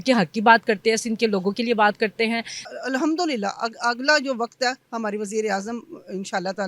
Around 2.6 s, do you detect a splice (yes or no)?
yes